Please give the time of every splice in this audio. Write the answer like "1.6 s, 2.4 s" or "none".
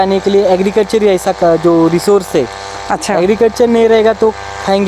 none